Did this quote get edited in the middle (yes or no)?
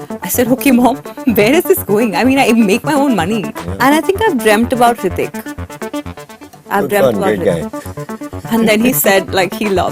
yes